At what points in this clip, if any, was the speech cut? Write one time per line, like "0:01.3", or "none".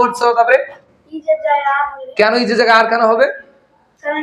none